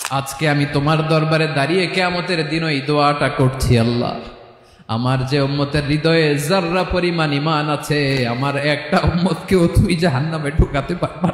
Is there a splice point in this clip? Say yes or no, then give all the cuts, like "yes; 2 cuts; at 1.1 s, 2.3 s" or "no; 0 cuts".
no; 0 cuts